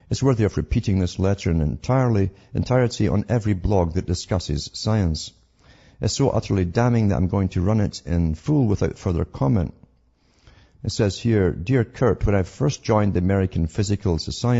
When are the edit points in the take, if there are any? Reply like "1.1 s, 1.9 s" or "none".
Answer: 3.6 s